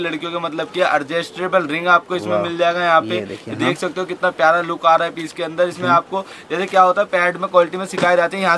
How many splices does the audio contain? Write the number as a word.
zero